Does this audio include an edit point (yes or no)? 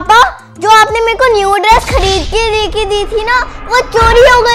no